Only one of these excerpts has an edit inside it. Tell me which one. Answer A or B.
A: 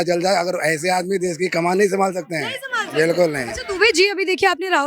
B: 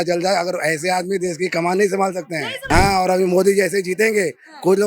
B